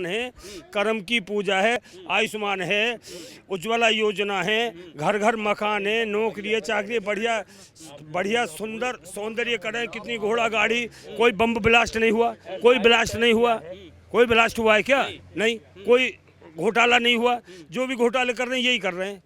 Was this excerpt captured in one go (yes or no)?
no